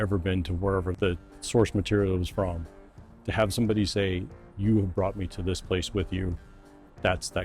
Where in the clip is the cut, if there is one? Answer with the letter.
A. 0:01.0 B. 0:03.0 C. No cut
A